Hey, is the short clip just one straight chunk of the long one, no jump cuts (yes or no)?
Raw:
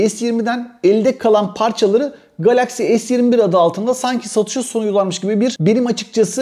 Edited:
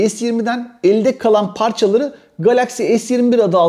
yes